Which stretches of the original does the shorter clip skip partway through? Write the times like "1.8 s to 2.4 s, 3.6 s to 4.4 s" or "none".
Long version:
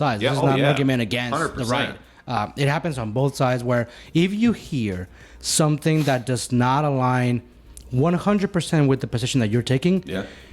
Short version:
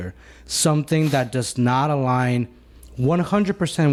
none